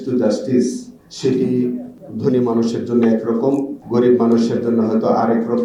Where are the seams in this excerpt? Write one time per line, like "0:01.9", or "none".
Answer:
none